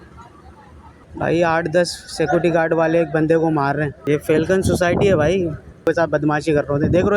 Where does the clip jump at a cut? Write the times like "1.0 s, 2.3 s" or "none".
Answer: 1.0 s, 3.9 s, 5.9 s